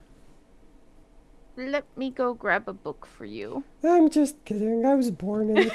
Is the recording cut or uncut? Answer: cut